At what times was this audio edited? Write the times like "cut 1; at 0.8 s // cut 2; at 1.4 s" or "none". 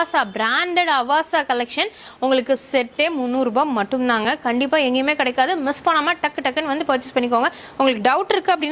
none